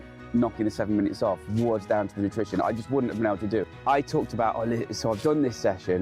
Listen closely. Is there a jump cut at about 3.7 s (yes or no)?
yes